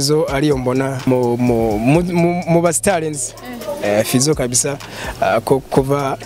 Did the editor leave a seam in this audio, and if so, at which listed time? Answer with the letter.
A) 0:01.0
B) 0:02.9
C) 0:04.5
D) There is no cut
A